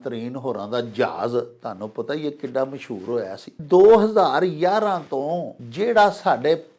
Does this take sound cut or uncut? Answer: cut